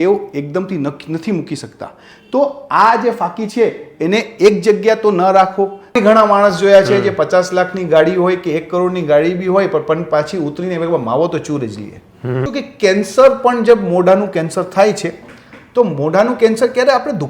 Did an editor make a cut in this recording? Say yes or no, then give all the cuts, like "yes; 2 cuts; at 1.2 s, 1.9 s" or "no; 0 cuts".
yes; 2 cuts; at 6.0 s, 12.4 s